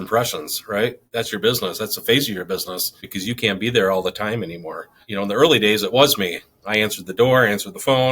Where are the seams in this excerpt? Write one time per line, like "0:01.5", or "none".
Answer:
0:01.0
0:03.1
0:05.0